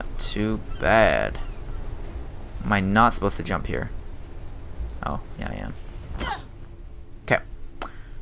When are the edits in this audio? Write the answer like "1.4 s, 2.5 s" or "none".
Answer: 1.5 s